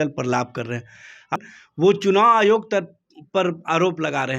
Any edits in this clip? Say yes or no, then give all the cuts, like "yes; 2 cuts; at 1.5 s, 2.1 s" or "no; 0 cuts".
yes; 1 cut; at 1.3 s